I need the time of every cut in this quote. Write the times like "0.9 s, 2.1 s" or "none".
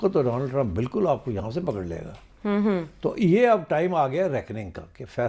none